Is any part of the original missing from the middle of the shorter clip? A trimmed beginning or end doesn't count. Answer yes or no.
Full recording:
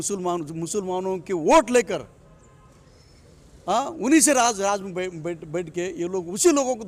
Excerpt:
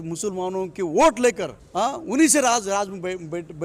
yes